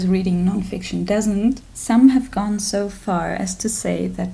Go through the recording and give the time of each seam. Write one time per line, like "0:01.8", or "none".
0:01.6